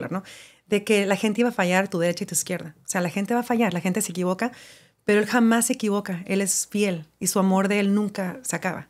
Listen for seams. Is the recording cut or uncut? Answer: uncut